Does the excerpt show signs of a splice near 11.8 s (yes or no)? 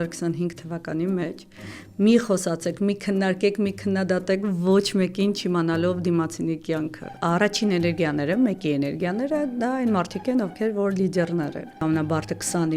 yes